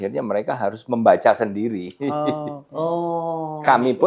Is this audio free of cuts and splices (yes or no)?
yes